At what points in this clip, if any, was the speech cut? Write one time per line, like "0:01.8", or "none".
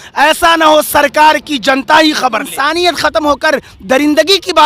0:02.6